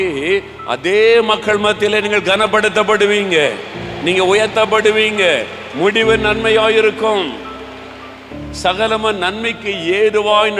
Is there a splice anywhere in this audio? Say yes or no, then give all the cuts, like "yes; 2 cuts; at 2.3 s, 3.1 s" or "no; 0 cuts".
no; 0 cuts